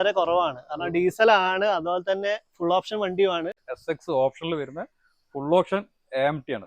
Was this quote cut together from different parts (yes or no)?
yes